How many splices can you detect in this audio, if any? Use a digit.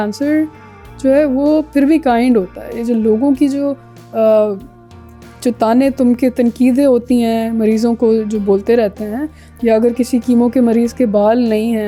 0